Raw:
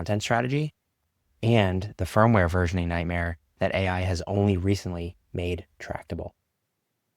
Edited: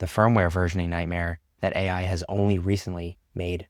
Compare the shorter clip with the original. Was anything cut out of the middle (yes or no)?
no